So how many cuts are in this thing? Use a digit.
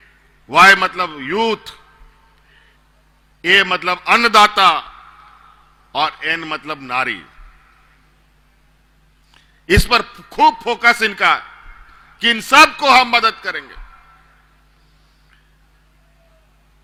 0